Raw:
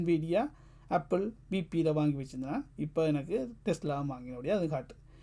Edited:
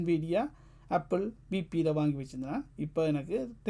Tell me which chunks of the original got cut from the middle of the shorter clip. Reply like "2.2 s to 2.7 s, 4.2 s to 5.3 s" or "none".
none

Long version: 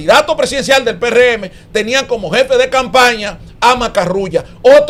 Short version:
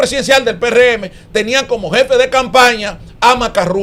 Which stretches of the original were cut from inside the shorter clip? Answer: none

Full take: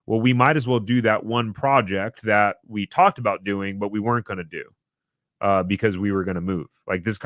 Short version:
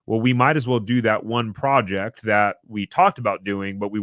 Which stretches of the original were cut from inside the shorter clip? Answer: none

